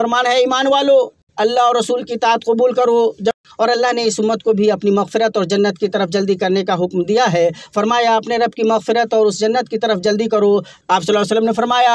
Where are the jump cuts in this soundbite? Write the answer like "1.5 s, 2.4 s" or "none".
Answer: 1.2 s, 3.3 s, 10.7 s

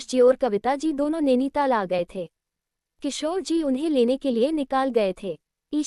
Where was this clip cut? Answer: none

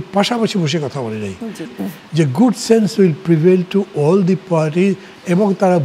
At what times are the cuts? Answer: 1.8 s

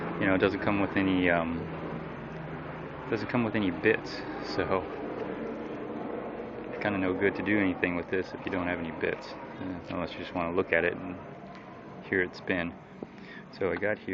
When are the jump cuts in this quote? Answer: 3.0 s

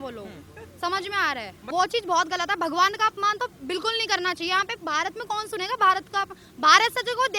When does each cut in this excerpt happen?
1.5 s

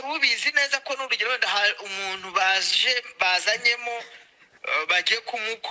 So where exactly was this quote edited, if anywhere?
none

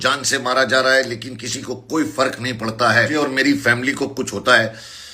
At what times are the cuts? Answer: 3.1 s

